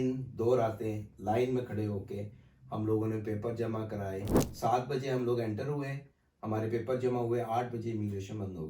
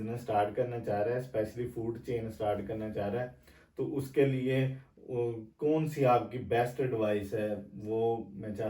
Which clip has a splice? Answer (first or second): first